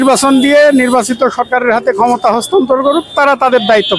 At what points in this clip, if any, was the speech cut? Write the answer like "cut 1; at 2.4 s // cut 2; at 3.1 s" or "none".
none